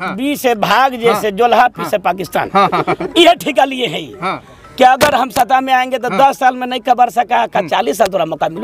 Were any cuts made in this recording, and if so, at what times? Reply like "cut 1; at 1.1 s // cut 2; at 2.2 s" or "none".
none